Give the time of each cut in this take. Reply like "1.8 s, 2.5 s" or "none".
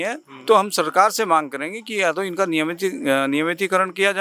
none